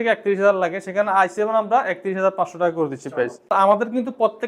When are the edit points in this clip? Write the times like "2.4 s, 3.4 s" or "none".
3.5 s

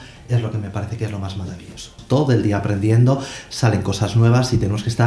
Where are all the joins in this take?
2.0 s

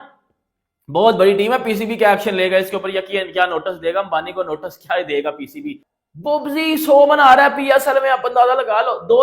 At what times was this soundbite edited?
none

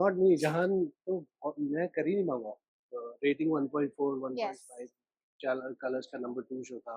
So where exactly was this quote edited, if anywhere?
2.7 s

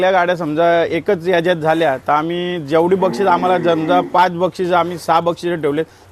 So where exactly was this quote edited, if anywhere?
none

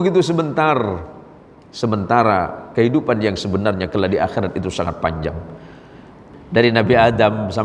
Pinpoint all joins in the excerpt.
6.4 s

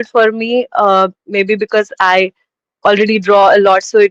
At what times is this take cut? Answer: none

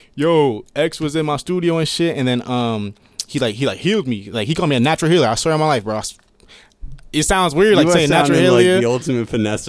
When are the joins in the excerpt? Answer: none

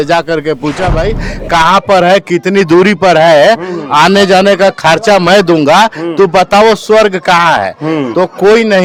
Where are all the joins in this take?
none

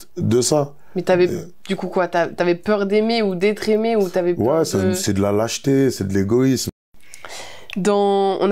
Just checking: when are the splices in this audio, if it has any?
6.7 s

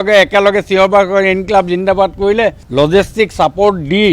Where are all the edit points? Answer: 2.6 s

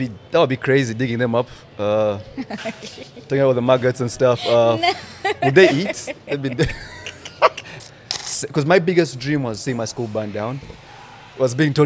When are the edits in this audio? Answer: 7.8 s

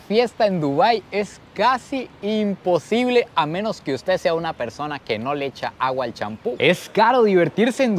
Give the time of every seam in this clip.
6.6 s

